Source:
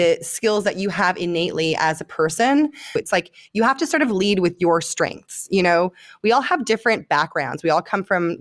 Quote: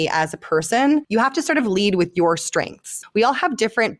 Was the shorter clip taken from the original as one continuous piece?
no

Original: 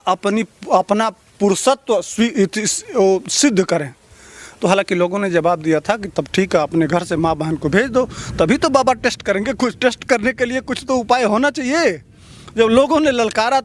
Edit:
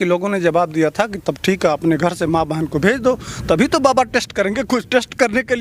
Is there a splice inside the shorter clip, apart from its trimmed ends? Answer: no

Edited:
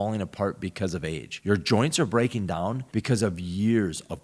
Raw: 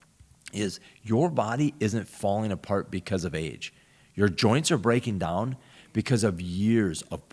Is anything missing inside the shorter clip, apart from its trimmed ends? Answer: yes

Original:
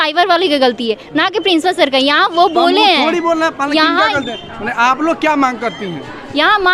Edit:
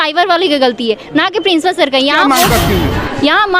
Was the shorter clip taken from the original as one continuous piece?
no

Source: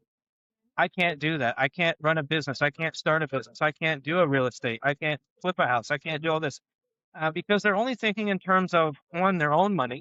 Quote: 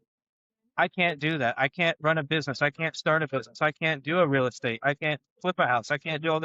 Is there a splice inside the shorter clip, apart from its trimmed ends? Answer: no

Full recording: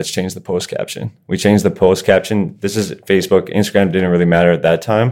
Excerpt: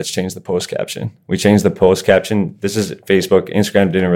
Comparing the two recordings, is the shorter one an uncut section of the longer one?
yes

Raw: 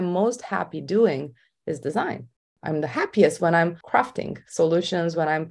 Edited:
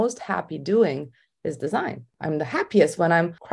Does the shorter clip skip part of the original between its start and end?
yes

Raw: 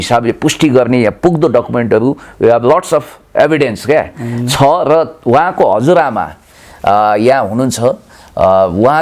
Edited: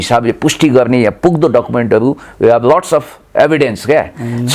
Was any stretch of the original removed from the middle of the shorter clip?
no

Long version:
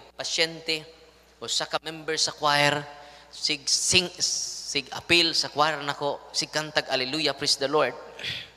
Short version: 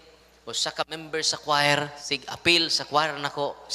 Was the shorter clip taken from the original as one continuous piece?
no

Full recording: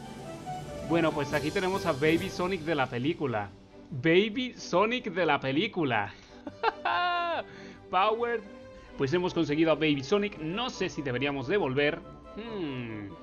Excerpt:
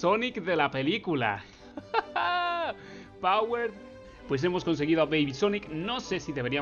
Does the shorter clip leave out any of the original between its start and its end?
no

